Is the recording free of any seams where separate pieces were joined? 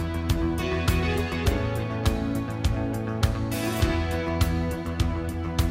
yes; 0 cuts

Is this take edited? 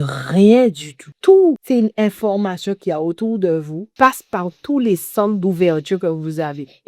yes; 3 cuts; at 1.1 s, 1.6 s, 3.8 s

